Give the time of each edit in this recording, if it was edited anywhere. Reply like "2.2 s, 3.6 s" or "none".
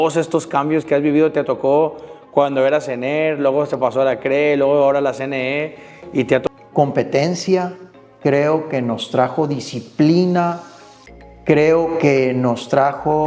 6.4 s